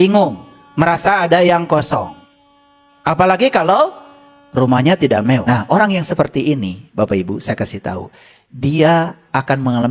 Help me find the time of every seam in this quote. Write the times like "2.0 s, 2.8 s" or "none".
5.4 s